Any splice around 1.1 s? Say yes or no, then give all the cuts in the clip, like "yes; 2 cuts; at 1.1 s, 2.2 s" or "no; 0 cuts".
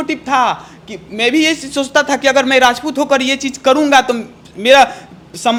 no; 0 cuts